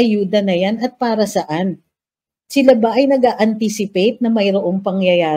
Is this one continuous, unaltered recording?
yes; 0 cuts

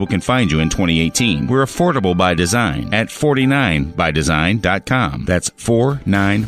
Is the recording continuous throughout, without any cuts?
yes; 0 cuts

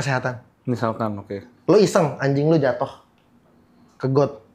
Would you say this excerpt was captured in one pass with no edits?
yes; 0 cuts

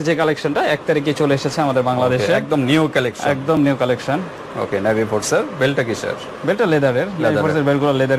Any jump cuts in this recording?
no; 0 cuts

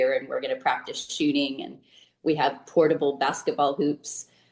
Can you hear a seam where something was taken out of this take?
no; 0 cuts

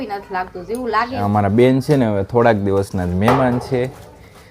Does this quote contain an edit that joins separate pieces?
yes; 1 cut; at 1.2 s

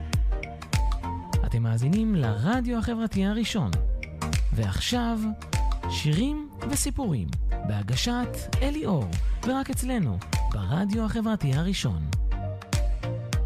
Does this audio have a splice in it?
no; 0 cuts

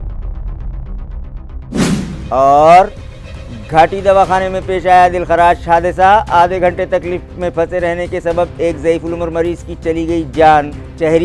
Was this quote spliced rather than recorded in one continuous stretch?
no; 0 cuts

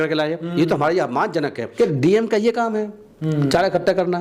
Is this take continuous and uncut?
no; 1 cut; at 1.6 s

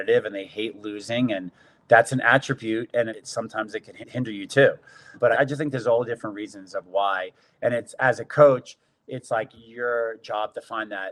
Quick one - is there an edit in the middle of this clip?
no; 0 cuts

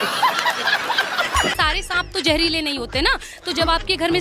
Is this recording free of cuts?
no; 1 cut; at 1.5 s

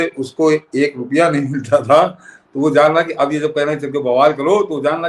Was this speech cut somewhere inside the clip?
no; 0 cuts

